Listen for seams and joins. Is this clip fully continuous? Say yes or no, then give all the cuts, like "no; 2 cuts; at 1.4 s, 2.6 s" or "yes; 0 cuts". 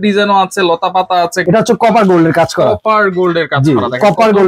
no; 1 cut; at 1.4 s